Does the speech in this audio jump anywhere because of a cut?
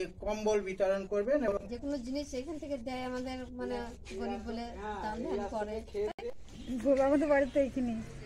yes; 2 cuts; at 1.5 s, 6.1 s

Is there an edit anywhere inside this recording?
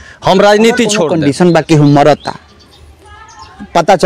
yes; 1 cut; at 1.1 s

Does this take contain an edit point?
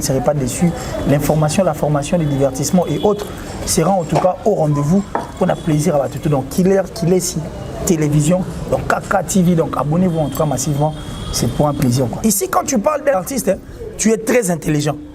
yes; 2 cuts; at 12.1 s, 13.2 s

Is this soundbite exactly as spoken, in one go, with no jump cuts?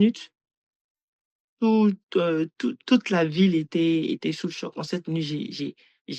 yes; 0 cuts

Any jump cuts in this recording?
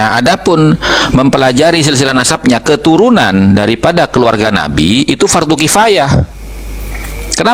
no; 0 cuts

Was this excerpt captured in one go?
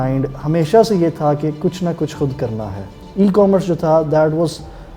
no; 1 cut; at 3.0 s

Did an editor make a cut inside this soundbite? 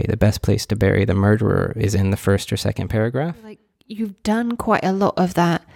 yes; 1 cut; at 3.6 s

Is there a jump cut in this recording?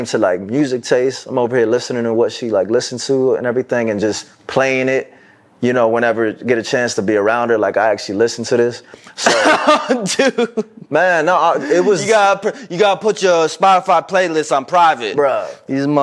yes; 1 cut; at 15.1 s

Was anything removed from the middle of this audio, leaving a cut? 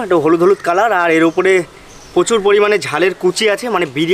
no; 0 cuts

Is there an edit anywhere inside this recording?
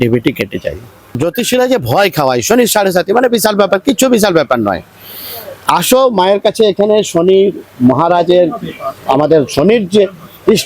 yes; 1 cut; at 1.1 s

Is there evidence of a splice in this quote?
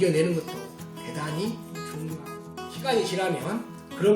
yes; 1 cut; at 2.2 s

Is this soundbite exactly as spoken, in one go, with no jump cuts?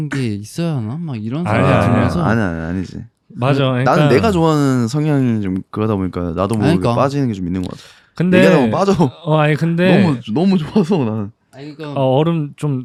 yes; 0 cuts

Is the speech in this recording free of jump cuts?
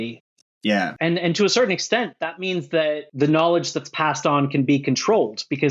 no; 1 cut; at 0.9 s

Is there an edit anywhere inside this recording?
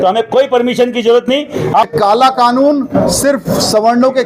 yes; 1 cut; at 1.9 s

